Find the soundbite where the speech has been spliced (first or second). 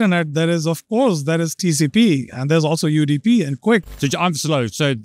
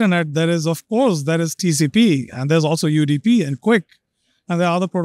first